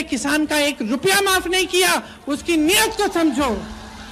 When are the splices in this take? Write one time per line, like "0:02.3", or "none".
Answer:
none